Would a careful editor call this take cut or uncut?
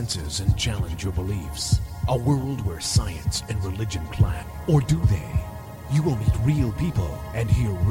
cut